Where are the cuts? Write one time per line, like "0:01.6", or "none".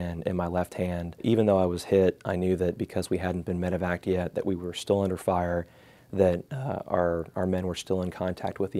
0:01.2